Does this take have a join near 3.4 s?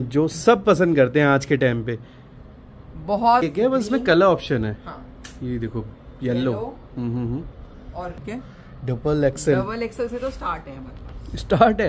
yes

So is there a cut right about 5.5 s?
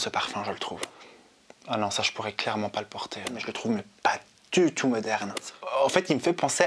yes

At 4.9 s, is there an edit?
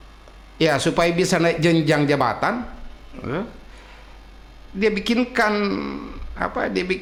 no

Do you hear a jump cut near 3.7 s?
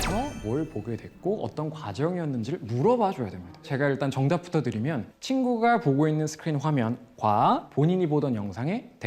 yes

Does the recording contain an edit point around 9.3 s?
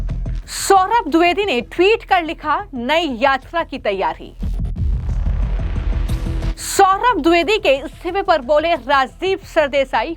no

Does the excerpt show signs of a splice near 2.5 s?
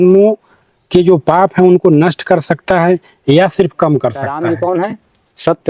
no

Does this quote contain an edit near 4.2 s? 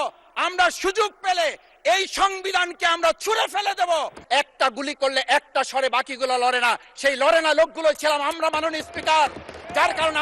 yes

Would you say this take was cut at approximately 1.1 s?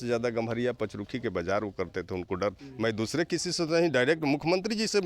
no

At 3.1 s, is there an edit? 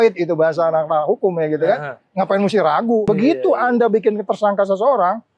yes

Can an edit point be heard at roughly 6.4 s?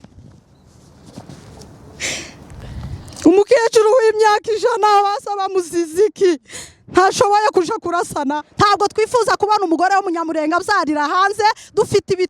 no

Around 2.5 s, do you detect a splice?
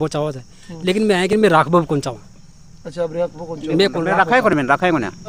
no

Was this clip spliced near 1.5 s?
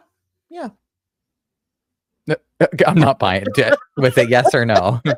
no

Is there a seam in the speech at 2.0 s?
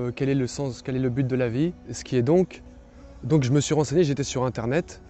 yes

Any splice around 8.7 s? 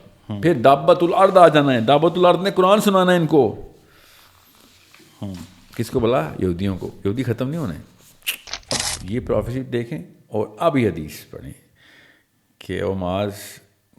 yes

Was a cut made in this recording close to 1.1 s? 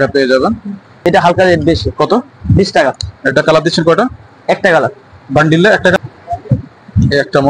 yes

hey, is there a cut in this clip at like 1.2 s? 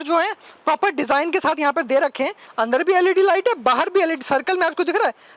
no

